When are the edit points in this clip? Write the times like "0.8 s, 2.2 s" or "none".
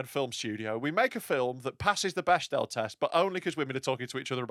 none